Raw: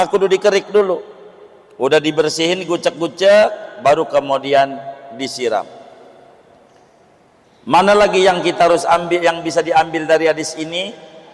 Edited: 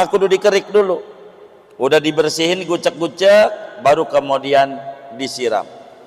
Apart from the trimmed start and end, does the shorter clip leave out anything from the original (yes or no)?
no